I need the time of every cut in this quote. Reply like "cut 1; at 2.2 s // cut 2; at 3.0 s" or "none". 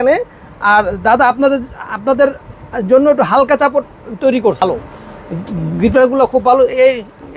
cut 1; at 4.6 s